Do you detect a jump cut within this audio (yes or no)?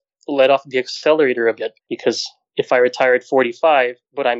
yes